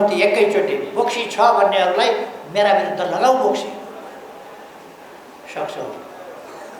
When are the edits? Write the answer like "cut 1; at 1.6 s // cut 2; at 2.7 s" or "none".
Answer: none